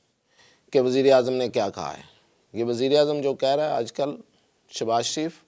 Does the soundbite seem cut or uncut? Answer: uncut